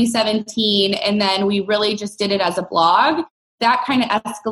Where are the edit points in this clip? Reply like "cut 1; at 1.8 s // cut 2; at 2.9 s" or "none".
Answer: cut 1; at 3.6 s